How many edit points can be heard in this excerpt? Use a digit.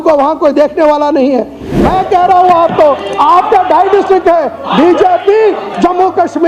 1